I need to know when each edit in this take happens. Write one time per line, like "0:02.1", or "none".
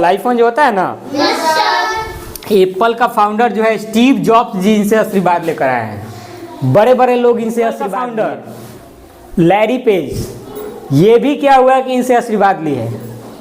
0:07.9